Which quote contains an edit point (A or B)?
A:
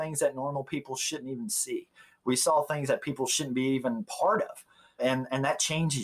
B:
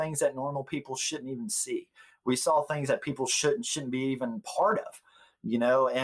A